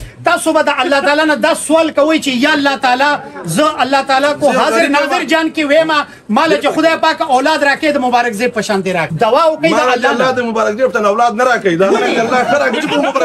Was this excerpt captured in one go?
no; 1 cut; at 9.1 s

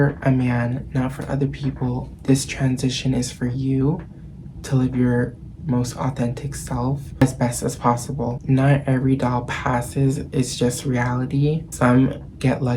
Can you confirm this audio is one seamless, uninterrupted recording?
no; 3 cuts; at 7.2 s, 8.4 s, 11.7 s

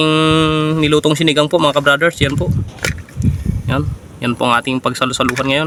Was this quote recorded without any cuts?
yes; 0 cuts

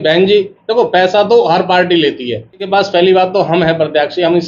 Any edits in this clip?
yes; 1 cut; at 2.7 s

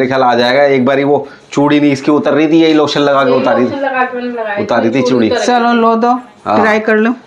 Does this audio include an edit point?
no; 0 cuts

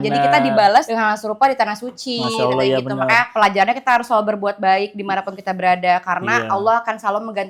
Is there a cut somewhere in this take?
no; 0 cuts

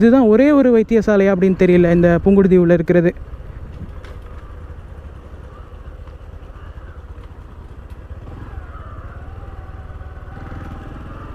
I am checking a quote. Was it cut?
no; 0 cuts

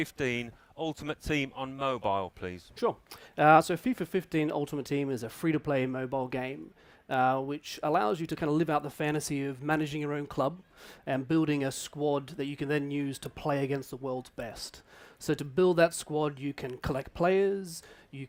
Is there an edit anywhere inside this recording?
no; 0 cuts

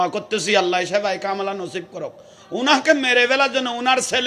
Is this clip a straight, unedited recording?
yes; 0 cuts

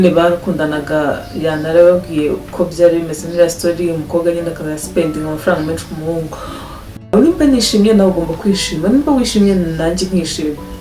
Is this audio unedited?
no; 1 cut; at 7.2 s

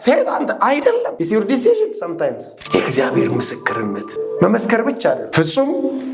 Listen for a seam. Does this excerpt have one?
yes; 4 cuts; at 1.1 s, 2.5 s, 4.1 s, 5.3 s

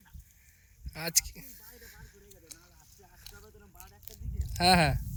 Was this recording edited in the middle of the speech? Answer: no; 0 cuts

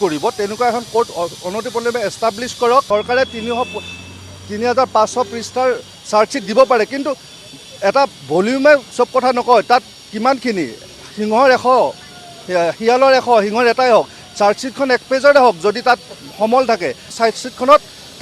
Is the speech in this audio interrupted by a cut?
yes; 2 cuts; at 2.9 s, 17.1 s

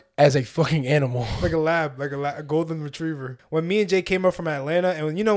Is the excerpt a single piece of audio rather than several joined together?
no; 1 cut; at 3.3 s

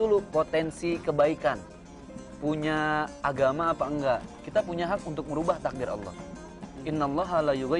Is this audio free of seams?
no; 1 cut; at 4.3 s

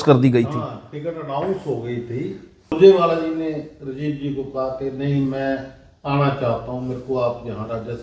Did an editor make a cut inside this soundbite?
yes; 1 cut; at 2.7 s

